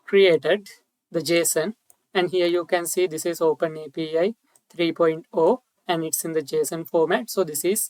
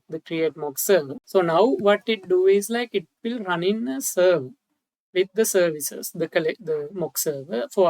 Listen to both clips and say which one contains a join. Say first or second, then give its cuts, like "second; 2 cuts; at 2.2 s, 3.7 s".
second; 1 cut; at 1.2 s